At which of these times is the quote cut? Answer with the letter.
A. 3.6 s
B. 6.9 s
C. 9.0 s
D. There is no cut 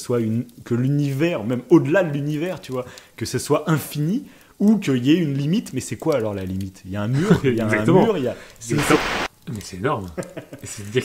C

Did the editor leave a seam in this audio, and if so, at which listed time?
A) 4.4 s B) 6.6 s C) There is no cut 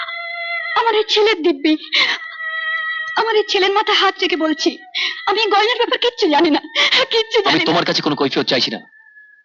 C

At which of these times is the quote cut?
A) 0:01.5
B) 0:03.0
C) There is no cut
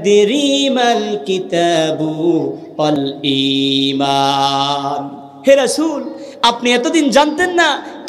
B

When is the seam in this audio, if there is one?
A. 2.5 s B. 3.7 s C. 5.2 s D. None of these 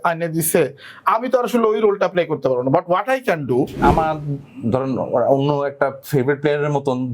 B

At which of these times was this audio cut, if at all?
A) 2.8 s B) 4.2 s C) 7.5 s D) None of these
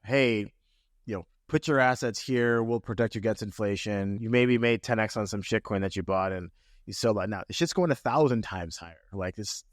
B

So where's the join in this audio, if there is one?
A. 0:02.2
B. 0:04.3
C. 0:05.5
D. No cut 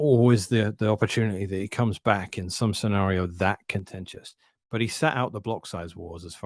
D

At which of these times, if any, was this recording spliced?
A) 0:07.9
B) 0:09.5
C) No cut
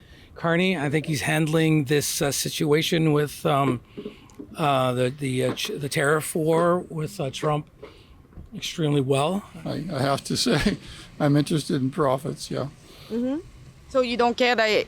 B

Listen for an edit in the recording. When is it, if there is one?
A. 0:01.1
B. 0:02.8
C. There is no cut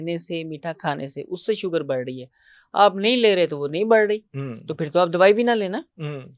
C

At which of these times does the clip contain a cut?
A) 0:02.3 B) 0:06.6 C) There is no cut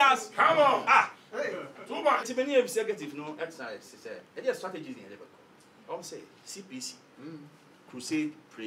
A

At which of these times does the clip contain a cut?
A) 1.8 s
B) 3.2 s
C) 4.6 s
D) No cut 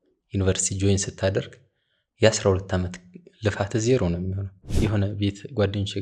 C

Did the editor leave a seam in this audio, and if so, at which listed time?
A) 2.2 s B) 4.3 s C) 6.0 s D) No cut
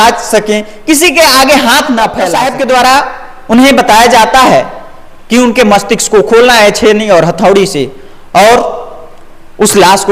A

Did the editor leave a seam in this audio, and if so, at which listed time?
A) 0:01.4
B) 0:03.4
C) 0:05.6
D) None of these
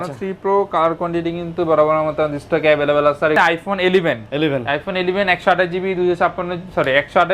B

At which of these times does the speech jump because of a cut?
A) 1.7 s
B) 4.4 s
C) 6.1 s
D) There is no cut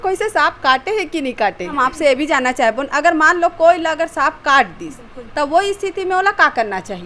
A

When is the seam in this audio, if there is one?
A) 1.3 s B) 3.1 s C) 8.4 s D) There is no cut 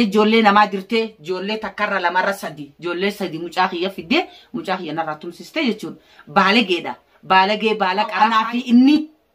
C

